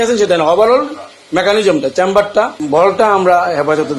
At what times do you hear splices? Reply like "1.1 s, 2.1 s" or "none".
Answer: 2.6 s